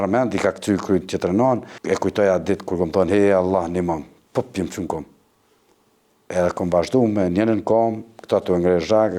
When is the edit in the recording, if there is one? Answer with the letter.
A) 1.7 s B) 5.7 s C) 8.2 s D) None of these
A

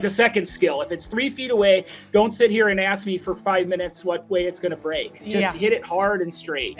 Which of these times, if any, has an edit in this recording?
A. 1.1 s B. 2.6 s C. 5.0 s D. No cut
D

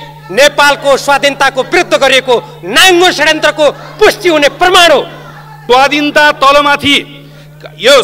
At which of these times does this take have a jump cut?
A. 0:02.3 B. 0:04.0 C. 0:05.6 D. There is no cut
C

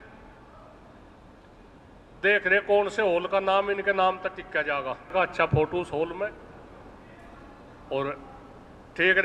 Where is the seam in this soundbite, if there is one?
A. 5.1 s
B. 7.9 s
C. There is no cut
A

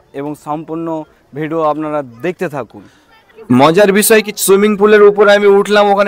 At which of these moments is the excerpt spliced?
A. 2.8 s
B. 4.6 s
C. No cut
C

